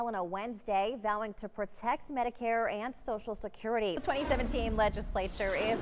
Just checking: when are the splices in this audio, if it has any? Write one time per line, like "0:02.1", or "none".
0:04.0